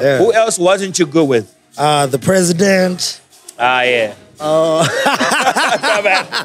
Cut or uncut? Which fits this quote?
uncut